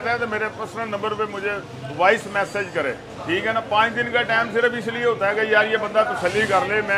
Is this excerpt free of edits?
no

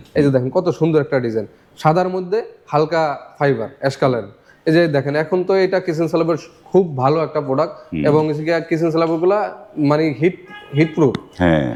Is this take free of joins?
yes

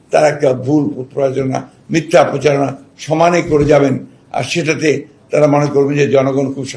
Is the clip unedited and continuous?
yes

